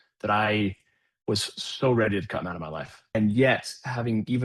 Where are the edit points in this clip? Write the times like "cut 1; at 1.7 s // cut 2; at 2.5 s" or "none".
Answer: cut 1; at 3.2 s